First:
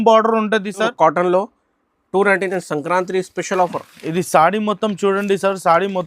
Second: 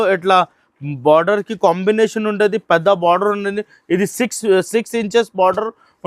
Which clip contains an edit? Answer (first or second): first